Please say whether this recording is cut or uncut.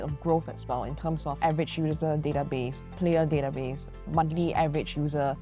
uncut